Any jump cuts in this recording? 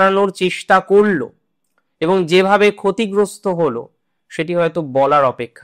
no; 0 cuts

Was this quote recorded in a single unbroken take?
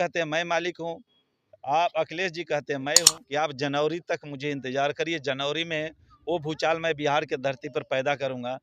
no; 1 cut; at 3.1 s

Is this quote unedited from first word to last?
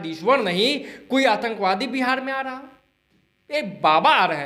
yes; 0 cuts

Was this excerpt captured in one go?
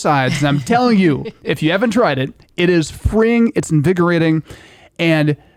yes; 0 cuts

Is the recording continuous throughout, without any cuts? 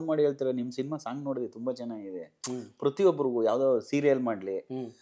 yes; 0 cuts

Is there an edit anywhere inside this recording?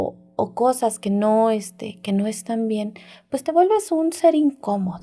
no; 0 cuts

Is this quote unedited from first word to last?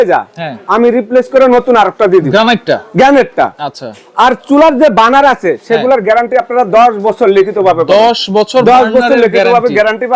yes; 0 cuts

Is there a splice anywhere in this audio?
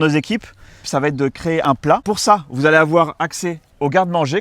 yes; 1 cut; at 2.0 s

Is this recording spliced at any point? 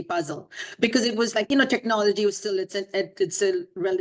yes; 1 cut; at 1.5 s

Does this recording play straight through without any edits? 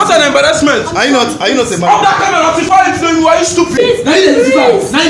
no; 1 cut; at 3.8 s

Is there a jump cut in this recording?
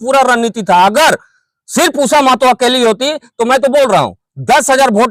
no; 0 cuts

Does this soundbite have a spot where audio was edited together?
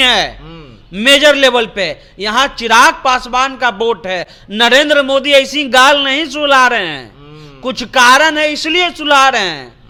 no; 0 cuts

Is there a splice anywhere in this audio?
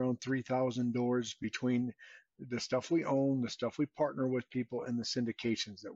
no; 0 cuts

